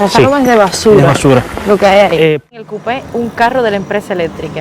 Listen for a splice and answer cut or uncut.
cut